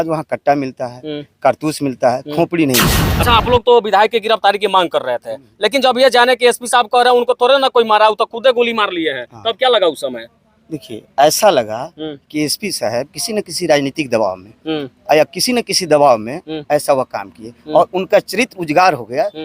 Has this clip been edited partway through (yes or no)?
yes